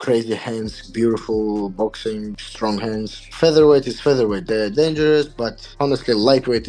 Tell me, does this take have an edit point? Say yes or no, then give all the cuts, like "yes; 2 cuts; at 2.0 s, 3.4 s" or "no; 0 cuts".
no; 0 cuts